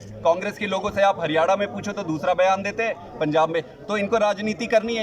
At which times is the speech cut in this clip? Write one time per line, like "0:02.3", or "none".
none